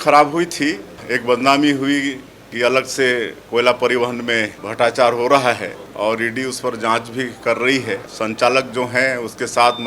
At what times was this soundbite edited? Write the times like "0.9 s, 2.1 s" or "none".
1.1 s, 4.6 s, 5.8 s, 8.1 s